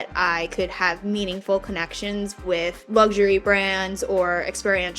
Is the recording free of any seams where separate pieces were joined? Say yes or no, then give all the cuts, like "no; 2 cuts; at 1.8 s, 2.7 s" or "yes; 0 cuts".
no; 1 cut; at 2.8 s